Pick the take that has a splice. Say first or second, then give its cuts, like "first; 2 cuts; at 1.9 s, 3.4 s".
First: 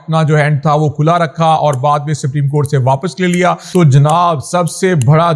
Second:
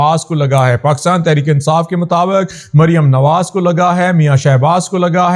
first; 1 cut; at 3.6 s